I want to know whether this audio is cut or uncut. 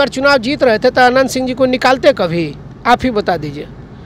uncut